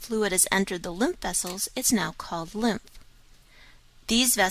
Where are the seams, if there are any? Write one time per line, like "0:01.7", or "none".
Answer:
0:00.9